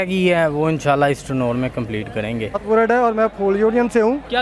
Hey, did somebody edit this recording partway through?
yes; 1 cut; at 2.6 s

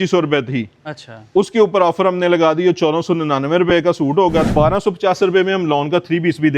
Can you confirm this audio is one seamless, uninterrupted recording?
no; 1 cut; at 4.5 s

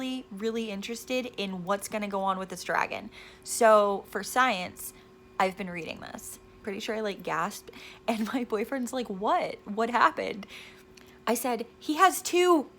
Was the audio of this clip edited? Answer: yes; 1 cut; at 6.6 s

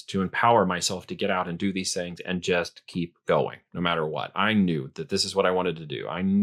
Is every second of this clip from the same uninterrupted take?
yes; 0 cuts

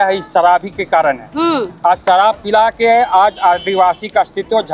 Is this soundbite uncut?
yes; 0 cuts

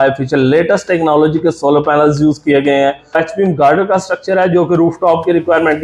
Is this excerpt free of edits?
no; 1 cut; at 3.2 s

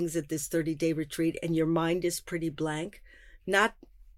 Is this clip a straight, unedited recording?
yes; 0 cuts

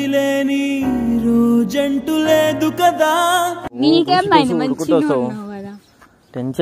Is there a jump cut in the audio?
no; 0 cuts

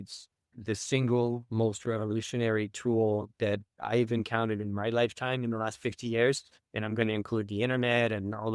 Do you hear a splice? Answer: no; 0 cuts

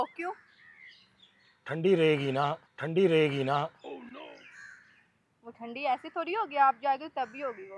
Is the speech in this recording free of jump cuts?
yes; 0 cuts

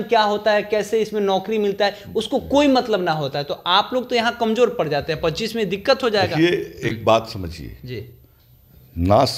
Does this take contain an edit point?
no; 0 cuts

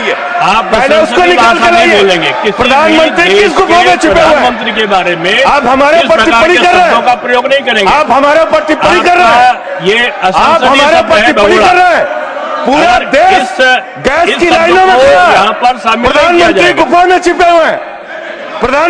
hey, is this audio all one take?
yes; 0 cuts

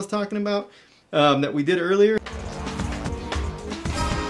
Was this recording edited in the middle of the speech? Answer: yes; 1 cut; at 2.2 s

